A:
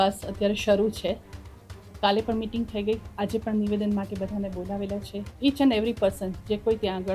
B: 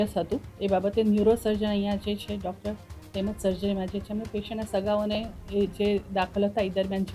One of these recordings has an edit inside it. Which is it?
A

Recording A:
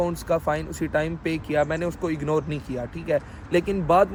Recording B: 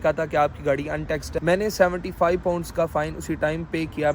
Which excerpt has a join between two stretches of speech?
B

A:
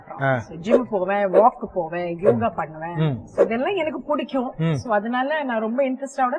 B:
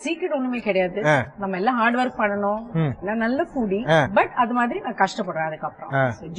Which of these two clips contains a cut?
B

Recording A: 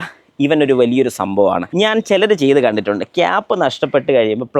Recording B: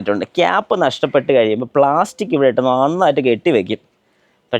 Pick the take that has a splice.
A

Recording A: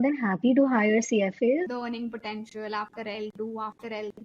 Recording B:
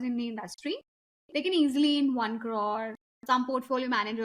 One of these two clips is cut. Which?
A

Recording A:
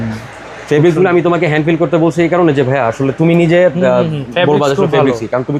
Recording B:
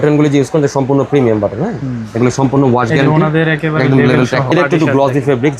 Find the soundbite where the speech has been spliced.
B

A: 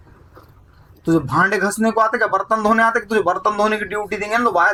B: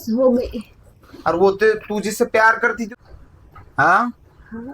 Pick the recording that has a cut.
B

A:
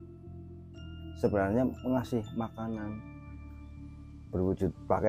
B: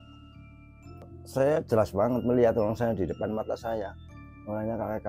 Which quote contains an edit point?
B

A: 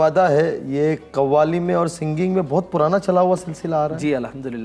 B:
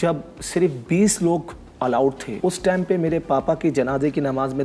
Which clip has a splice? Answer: B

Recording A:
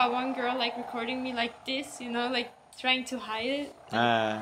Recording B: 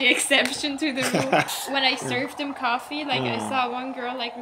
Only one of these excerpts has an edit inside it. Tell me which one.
B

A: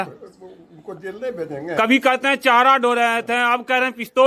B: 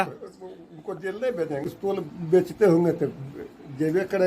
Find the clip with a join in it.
B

